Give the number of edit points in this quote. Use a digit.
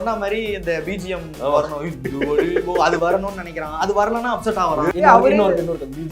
1